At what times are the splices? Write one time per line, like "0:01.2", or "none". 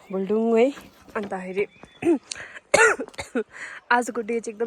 none